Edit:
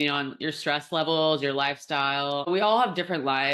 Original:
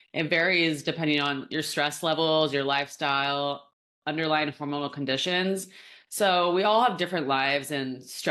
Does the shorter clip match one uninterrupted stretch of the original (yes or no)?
no